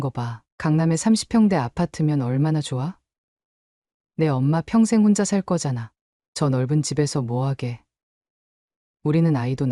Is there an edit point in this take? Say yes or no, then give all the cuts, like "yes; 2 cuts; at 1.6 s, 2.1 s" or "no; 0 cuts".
no; 0 cuts